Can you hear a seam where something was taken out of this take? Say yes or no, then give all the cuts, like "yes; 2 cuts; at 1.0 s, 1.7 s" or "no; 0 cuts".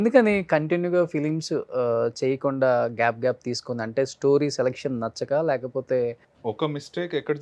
no; 0 cuts